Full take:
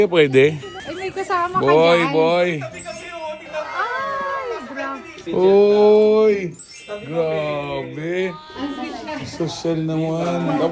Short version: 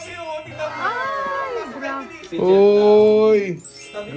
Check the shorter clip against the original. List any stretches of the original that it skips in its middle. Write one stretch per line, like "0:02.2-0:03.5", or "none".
none